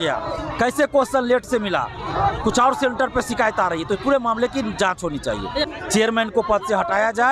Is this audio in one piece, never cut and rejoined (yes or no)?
no